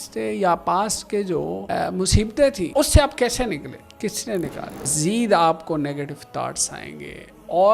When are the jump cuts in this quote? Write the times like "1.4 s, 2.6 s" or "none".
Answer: 1.6 s, 2.6 s, 3.8 s, 4.9 s